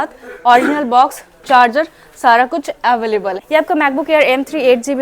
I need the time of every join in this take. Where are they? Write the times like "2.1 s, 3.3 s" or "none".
3.4 s